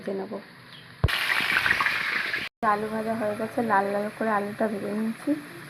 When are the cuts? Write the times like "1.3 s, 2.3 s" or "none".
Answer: 2.6 s